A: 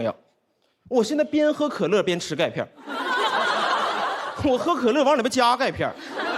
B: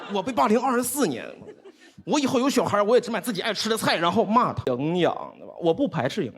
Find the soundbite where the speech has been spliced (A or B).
B